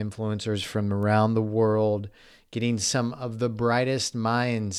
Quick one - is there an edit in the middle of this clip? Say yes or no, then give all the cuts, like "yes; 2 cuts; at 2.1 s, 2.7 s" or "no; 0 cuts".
no; 0 cuts